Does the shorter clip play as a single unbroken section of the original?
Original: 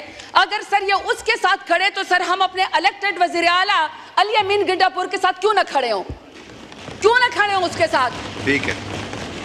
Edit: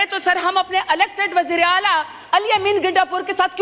yes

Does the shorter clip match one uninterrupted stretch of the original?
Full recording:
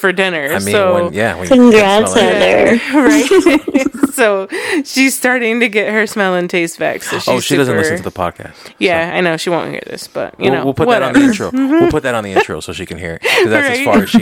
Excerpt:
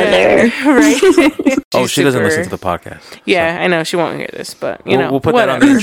no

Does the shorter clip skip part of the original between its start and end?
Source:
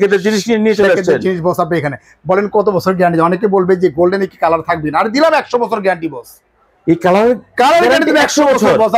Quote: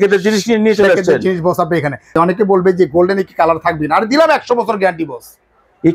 yes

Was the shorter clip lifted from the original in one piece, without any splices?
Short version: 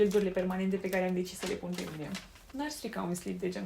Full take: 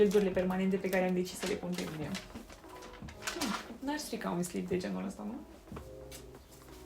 no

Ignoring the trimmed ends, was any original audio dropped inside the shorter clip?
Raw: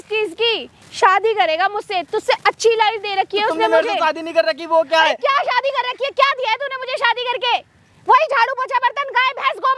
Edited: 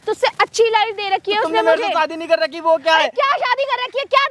no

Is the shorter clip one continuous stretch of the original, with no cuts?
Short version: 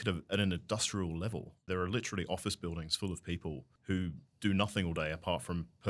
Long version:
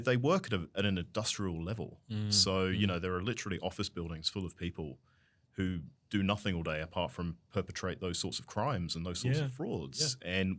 no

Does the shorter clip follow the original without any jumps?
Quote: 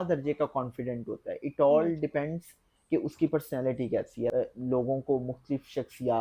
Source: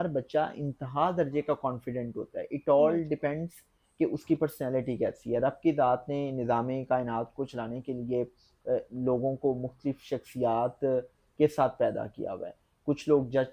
no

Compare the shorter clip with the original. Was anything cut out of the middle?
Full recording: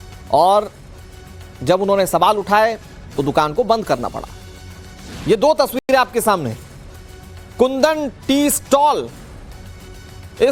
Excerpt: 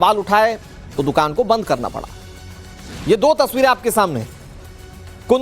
yes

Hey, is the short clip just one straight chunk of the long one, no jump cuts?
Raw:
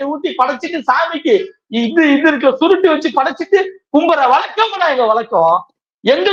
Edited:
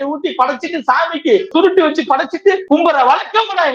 no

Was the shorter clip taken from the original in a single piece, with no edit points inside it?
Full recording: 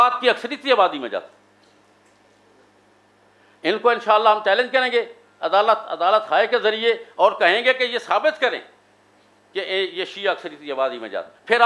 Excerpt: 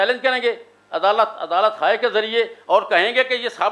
yes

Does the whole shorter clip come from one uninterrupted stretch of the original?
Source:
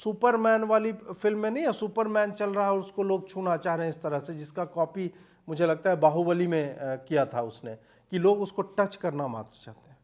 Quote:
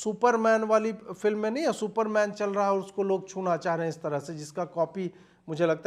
yes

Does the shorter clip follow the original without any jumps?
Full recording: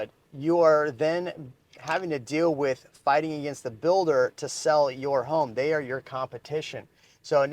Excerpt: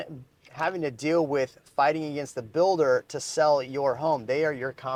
yes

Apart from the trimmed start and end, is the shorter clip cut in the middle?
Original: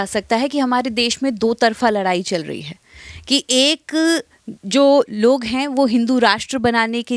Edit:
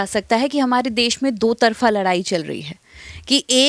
no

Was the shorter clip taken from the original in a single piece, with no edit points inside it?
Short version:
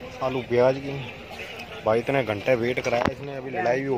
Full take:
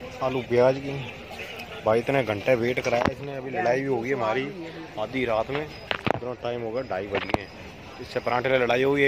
yes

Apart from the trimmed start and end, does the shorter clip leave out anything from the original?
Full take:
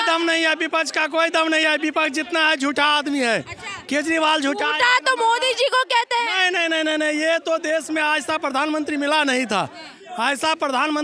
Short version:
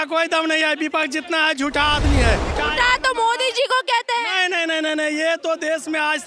yes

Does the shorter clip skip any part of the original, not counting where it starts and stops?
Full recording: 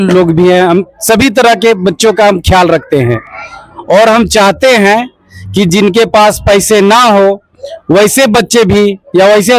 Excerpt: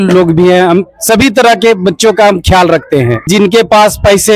yes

